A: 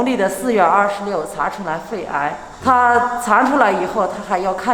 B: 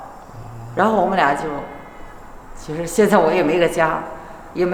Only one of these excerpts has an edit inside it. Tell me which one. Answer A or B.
A